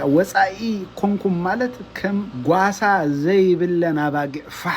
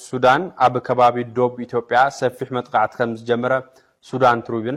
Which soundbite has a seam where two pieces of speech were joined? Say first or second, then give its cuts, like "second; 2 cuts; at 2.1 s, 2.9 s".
first; 1 cut; at 2.3 s